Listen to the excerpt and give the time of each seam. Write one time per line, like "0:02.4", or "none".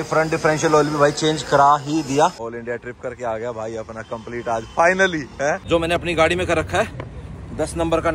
0:02.5
0:05.6